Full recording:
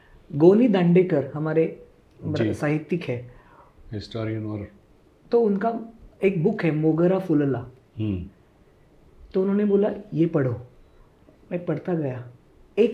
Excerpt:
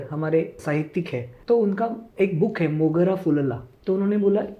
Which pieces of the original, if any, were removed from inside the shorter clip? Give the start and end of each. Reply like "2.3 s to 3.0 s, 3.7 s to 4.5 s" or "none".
2.1 s to 4.7 s, 5.9 s to 6.1 s, 7.7 s to 9.2 s